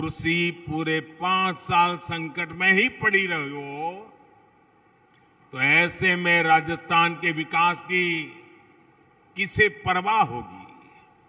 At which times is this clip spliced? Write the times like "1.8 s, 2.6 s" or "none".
none